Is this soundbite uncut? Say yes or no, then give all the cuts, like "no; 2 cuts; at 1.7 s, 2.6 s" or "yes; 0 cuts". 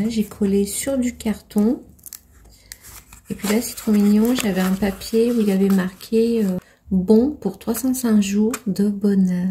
yes; 0 cuts